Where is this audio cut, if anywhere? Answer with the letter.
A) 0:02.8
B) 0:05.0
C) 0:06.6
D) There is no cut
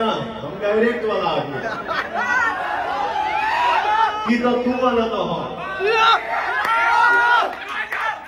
D